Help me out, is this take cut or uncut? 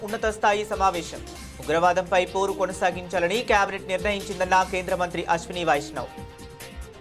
cut